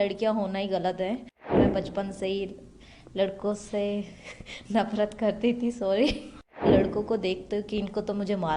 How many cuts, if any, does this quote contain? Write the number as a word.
two